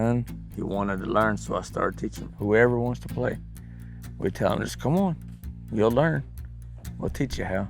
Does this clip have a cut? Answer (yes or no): yes